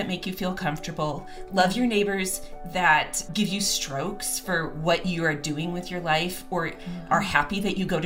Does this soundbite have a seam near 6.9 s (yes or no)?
no